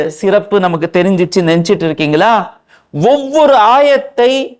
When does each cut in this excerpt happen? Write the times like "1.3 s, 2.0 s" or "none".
none

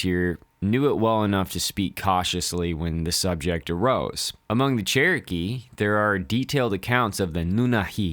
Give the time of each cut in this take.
4.3 s

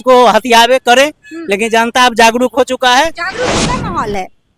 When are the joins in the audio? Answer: 3.6 s

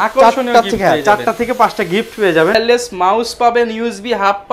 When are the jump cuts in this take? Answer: 2.6 s

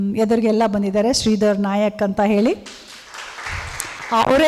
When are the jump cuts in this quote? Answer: 3.5 s

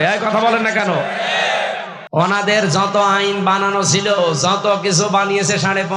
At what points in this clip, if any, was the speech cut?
1.9 s

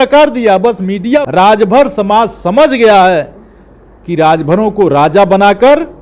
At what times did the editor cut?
1.2 s

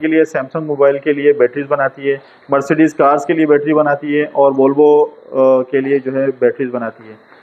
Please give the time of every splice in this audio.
none

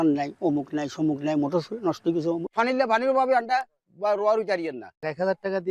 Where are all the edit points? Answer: 2.4 s, 4.8 s

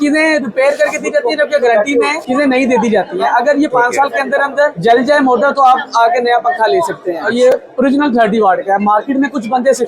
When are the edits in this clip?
2.2 s, 4.8 s, 7.3 s

